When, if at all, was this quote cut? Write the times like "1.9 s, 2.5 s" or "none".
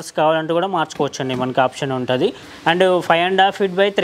2.5 s